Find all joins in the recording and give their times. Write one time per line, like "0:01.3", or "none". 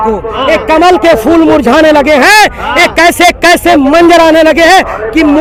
none